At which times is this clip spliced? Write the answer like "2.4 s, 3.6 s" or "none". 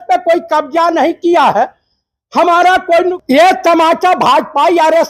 3.2 s